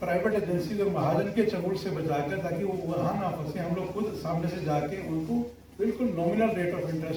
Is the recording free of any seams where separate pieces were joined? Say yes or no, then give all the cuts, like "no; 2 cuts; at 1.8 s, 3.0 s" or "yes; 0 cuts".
yes; 0 cuts